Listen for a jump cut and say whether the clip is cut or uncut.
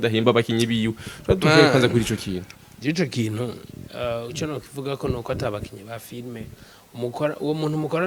uncut